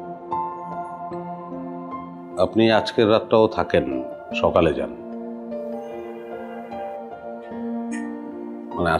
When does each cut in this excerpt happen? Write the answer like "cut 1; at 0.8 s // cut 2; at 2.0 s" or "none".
none